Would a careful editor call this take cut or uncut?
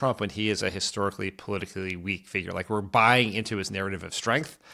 uncut